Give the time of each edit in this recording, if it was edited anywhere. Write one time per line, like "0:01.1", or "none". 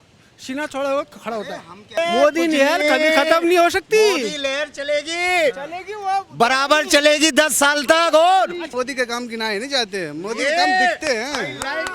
0:02.0
0:08.6